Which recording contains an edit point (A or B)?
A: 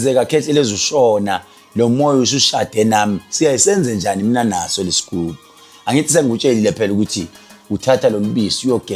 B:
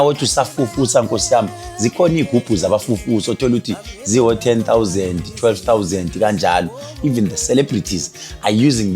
B